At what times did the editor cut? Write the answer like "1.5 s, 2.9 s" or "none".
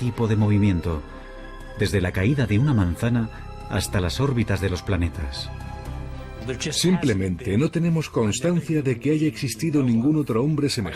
3.9 s